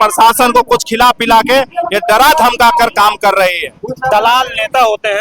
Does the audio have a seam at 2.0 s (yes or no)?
no